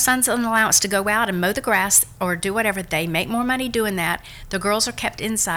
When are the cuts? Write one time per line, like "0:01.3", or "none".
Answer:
none